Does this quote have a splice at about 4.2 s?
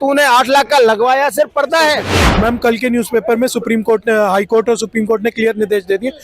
no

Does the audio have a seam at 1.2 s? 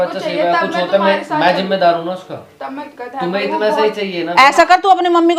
no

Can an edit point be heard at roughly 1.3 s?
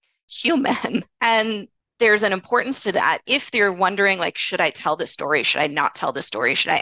yes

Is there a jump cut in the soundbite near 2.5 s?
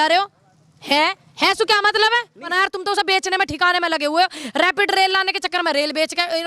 yes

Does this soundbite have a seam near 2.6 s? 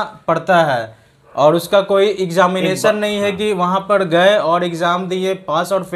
no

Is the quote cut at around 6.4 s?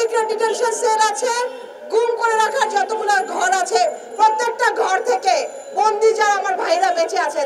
no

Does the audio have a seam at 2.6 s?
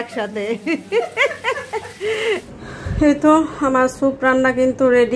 yes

